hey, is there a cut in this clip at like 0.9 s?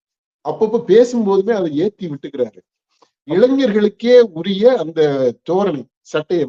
no; 1 cut; at 3.3 s

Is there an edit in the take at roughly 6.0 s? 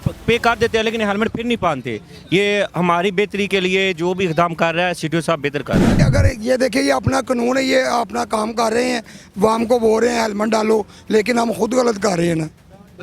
yes; 1 cut; at 6.0 s

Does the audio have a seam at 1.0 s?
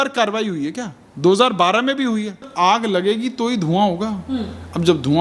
no; 1 cut; at 2.5 s

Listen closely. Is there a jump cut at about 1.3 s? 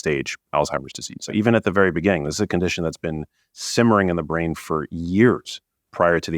yes; 1 cut; at 1.3 s

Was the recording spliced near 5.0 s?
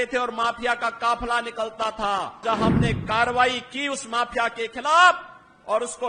no; 1 cut; at 2.4 s

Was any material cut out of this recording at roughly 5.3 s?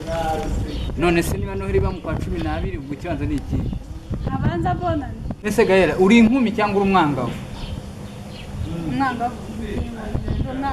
yes; 1 cut; at 5.3 s

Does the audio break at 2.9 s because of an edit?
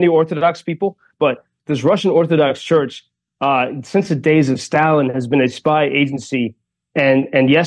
no; 1 cut; at 1.2 s

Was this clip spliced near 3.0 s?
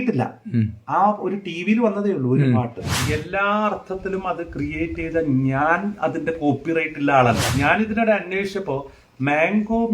yes; 2 cuts; at 3.0 s, 7.5 s

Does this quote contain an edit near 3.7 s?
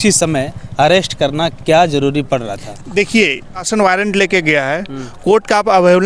yes; 1 cut; at 3.7 s

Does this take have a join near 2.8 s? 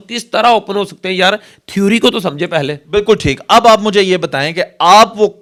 no; 0 cuts

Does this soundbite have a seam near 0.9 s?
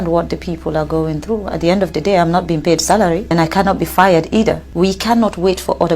no; 2 cuts; at 3.3 s, 4.7 s

